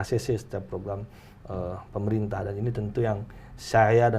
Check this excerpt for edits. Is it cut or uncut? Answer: uncut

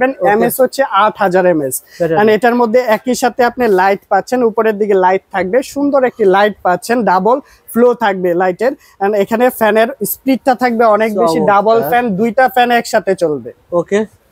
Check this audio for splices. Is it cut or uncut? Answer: uncut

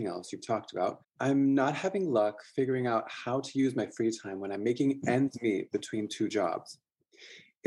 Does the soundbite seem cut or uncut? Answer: cut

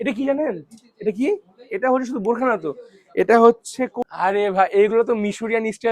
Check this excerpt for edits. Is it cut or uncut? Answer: cut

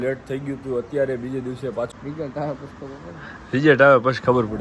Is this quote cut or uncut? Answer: cut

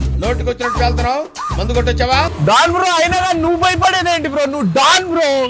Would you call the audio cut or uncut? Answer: cut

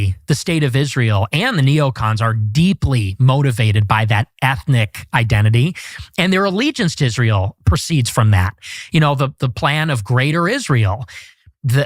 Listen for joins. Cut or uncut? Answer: uncut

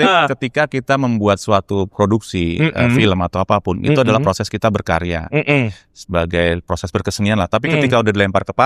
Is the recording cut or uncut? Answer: uncut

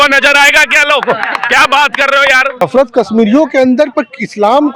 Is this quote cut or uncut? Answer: cut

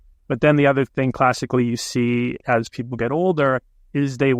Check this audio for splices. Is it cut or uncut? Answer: uncut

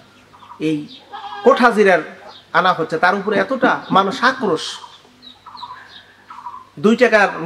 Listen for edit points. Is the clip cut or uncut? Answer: uncut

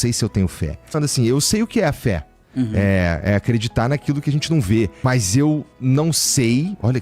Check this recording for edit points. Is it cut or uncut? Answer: cut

